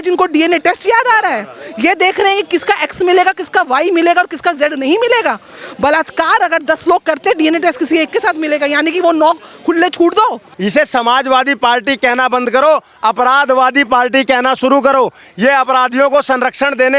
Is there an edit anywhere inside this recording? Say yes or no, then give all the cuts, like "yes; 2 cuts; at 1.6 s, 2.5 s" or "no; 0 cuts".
yes; 1 cut; at 10.5 s